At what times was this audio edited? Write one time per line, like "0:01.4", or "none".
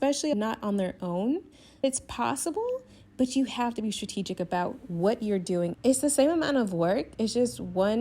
0:01.8
0:05.8